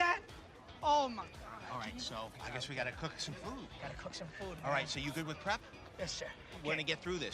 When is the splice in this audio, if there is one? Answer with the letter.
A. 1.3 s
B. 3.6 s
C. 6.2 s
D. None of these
D